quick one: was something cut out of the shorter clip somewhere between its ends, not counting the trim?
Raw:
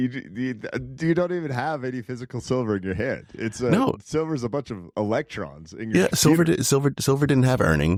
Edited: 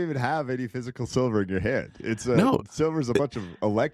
no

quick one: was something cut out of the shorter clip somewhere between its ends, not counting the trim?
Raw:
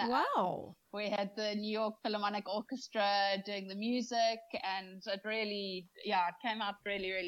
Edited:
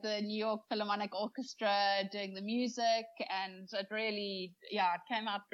no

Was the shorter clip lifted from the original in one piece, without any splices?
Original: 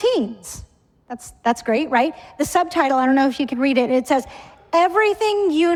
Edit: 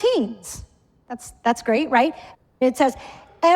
no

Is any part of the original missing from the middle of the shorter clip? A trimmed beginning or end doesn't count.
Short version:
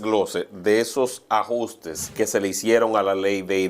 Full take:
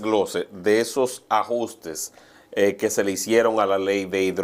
yes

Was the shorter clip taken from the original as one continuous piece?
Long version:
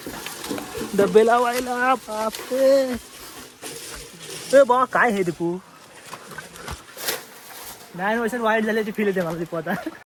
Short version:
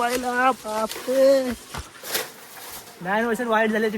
no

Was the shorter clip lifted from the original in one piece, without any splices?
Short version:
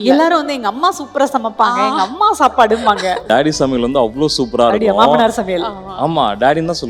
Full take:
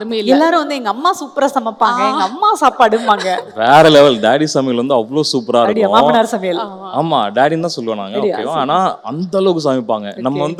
no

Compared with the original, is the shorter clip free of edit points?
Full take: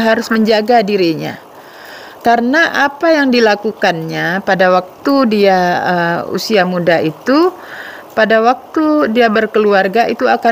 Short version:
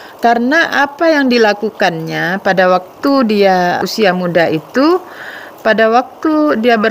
no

